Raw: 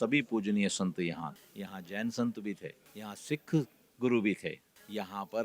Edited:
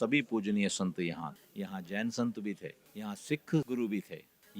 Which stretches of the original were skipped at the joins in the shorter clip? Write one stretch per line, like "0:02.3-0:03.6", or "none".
0:03.7-0:04.0